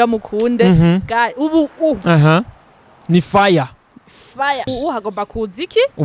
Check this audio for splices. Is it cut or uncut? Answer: cut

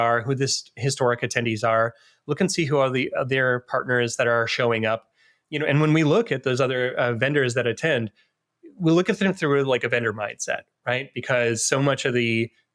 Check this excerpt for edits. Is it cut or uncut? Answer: uncut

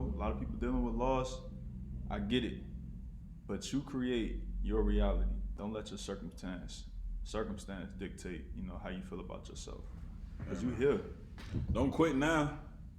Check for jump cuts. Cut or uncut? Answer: cut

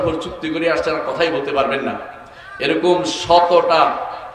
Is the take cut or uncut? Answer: uncut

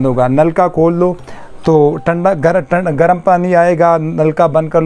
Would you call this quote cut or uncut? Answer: uncut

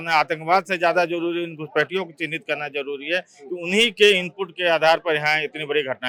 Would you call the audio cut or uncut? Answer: uncut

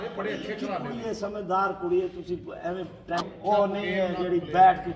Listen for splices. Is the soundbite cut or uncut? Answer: cut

